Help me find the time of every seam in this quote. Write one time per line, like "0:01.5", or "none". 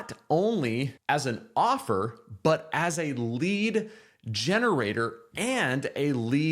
0:00.9